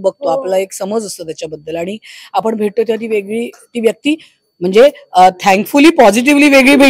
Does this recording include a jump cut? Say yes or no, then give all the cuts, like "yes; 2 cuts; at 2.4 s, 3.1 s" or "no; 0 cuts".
no; 0 cuts